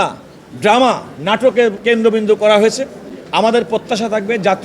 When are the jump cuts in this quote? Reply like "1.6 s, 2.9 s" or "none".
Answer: 1.8 s